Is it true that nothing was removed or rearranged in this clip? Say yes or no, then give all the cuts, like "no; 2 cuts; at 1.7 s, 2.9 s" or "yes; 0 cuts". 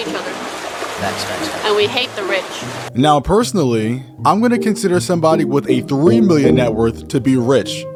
yes; 0 cuts